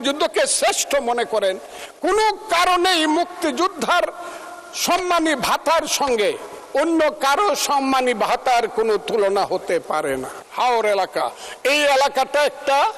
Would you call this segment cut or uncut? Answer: cut